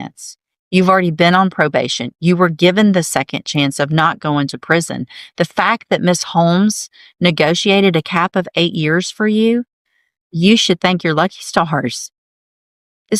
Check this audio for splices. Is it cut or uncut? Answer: uncut